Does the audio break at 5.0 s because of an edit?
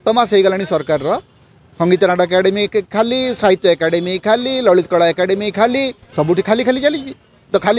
no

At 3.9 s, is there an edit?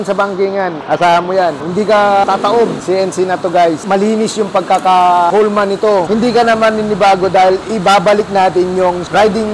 yes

